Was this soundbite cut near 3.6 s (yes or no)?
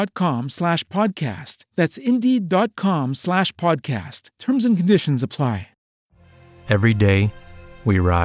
no